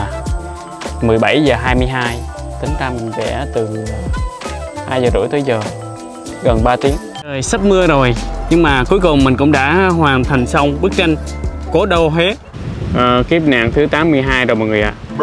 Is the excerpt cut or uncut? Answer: cut